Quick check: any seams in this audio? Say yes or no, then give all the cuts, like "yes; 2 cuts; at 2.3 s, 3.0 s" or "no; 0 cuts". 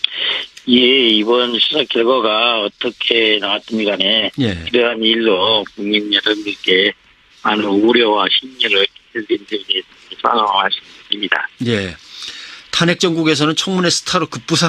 yes; 1 cut; at 10.5 s